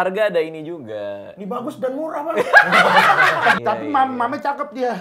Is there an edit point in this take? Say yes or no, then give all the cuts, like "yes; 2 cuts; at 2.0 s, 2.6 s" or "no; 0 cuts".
yes; 1 cut; at 3.6 s